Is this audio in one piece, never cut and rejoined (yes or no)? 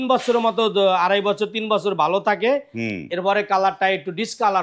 yes